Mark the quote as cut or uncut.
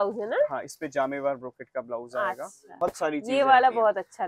cut